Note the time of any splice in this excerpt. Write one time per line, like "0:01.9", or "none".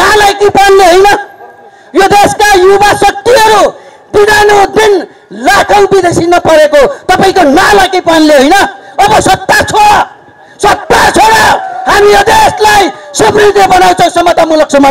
none